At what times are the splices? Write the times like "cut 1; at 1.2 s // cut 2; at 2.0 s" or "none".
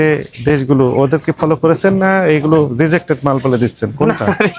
none